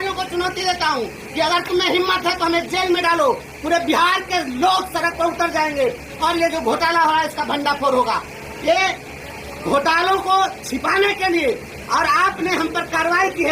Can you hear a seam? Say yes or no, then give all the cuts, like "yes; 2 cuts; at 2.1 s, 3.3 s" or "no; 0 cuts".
no; 0 cuts